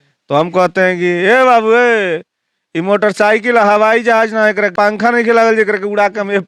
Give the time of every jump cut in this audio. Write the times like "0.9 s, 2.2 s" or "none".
4.7 s